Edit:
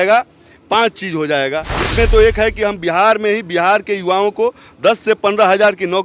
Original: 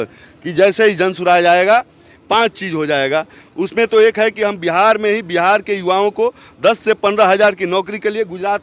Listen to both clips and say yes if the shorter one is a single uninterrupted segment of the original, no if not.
no